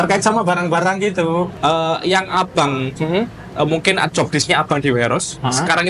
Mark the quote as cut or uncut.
cut